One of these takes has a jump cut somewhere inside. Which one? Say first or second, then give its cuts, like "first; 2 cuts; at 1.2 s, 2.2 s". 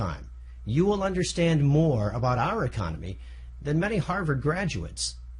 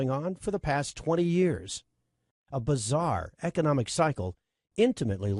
first; 1 cut; at 4.2 s